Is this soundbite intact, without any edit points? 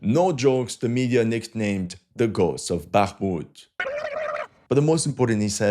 no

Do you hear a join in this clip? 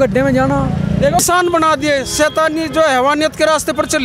yes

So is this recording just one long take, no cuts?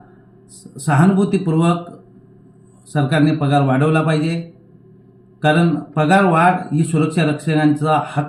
yes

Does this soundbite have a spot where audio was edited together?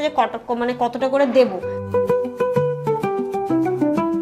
yes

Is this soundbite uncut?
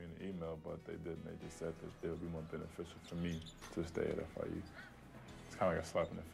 no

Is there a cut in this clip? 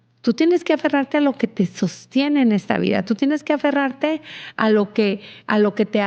no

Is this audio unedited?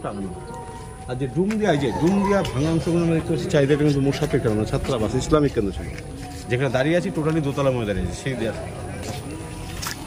yes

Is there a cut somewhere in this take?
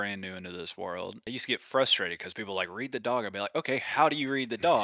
yes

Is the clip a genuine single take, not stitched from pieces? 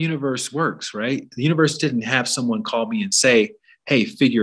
yes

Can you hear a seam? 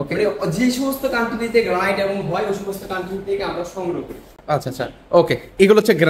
no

